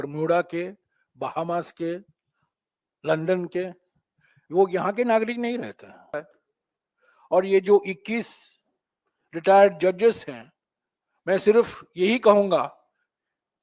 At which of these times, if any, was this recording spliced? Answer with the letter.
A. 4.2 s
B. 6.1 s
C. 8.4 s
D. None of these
B